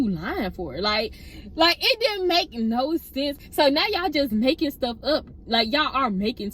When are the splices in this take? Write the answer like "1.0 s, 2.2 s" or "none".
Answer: 3.4 s